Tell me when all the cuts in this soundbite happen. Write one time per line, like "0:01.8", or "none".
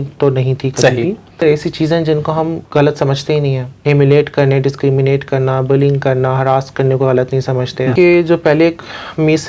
0:01.4
0:02.6
0:03.7
0:07.9